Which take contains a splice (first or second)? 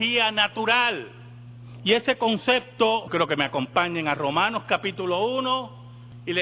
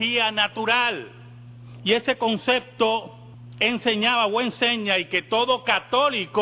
second